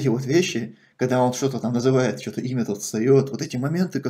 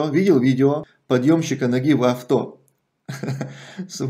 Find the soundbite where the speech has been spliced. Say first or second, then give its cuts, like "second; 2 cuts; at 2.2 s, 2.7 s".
second; 1 cut; at 0.9 s